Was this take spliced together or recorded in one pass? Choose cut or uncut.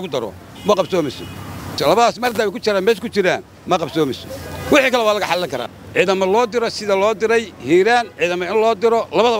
cut